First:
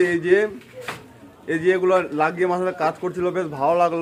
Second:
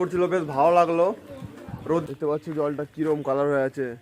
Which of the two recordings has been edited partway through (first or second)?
second